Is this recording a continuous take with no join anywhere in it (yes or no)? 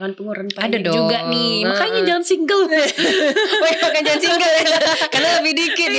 yes